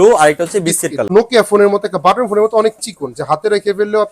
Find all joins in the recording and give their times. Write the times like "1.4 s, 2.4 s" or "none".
1.1 s